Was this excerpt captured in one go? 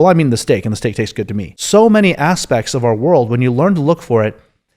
no; 1 cut; at 1.5 s

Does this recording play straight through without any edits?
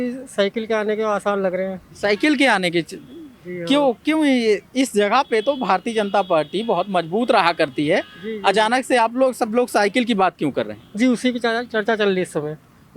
yes; 0 cuts

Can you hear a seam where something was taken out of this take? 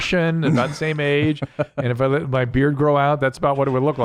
no; 0 cuts

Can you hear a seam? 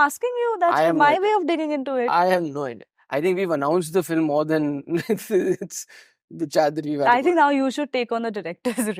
no; 0 cuts

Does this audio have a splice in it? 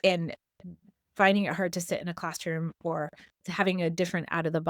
yes; 1 cut; at 3.3 s

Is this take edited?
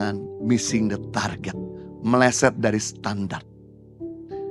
no; 0 cuts

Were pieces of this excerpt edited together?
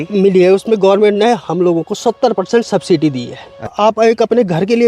yes; 1 cut; at 3.7 s

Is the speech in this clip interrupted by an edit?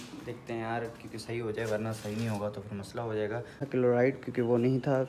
yes; 1 cut; at 3.6 s

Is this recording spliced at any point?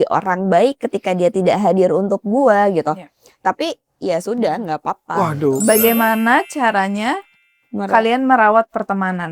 yes; 1 cut; at 5.1 s

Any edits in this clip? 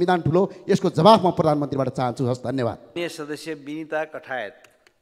no; 0 cuts

